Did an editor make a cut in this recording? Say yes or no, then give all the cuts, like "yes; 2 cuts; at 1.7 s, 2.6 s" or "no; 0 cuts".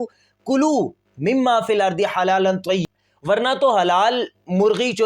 yes; 1 cut; at 2.8 s